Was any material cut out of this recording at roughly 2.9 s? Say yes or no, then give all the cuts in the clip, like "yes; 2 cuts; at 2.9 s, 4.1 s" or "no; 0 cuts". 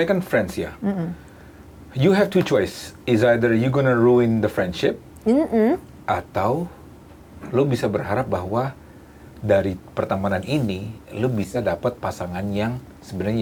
no; 0 cuts